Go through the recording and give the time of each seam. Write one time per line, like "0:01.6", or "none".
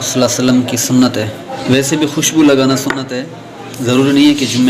0:01.6